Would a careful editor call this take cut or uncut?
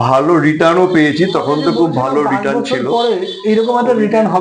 cut